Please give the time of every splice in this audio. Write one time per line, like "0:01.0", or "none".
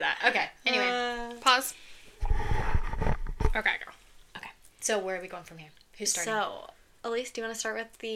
none